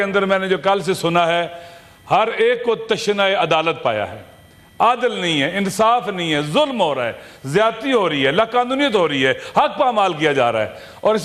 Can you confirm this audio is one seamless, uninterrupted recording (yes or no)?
yes